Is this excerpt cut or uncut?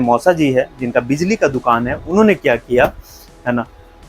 uncut